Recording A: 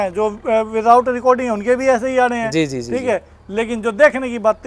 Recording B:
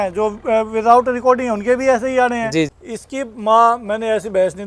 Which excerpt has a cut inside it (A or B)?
B